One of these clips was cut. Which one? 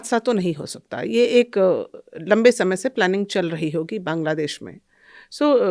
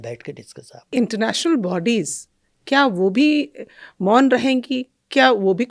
second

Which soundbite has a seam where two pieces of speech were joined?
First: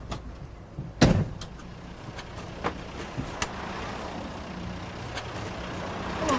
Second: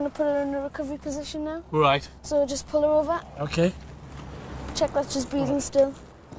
first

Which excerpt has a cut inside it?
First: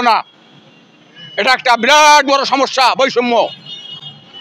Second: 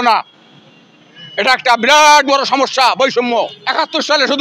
second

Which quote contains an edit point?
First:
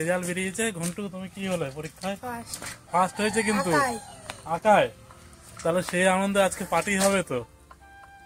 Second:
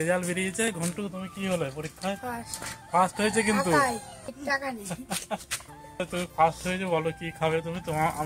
second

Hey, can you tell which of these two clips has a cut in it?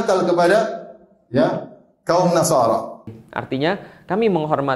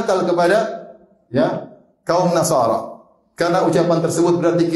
first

